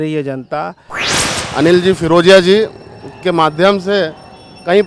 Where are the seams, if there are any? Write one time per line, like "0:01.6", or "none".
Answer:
0:01.0

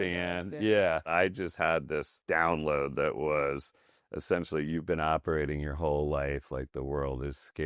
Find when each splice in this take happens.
0:01.1
0:02.1

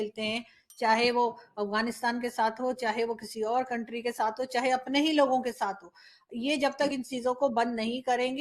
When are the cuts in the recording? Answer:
none

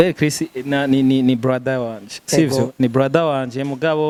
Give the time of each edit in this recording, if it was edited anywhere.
none

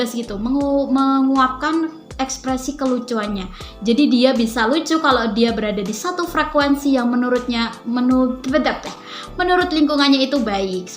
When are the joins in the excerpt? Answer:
0:09.1

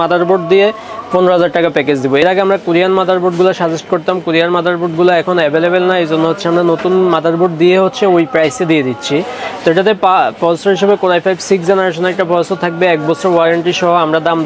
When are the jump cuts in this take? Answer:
none

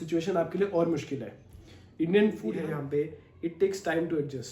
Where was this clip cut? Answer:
0:02.5

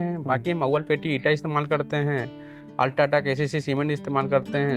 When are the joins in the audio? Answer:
none

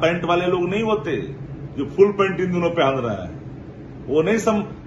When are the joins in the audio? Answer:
none

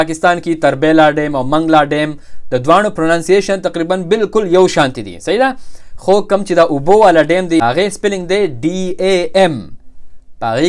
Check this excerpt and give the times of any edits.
0:07.6

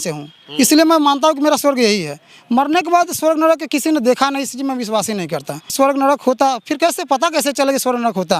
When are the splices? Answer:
none

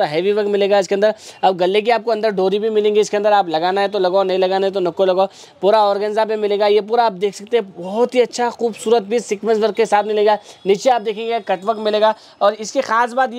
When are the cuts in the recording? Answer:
none

